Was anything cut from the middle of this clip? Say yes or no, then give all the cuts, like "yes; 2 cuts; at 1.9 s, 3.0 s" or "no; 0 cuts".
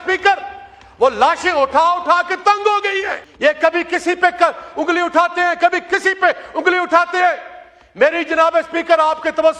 yes; 1 cut; at 3.2 s